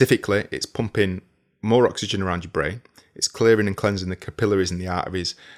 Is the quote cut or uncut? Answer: uncut